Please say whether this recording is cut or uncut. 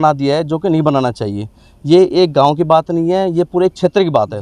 uncut